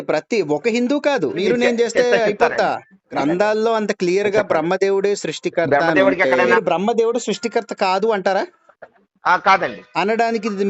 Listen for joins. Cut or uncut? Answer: cut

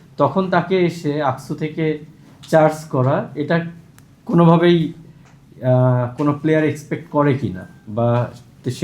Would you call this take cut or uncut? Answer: uncut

